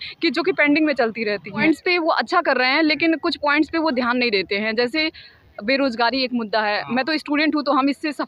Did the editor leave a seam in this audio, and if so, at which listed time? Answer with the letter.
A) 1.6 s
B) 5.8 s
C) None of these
A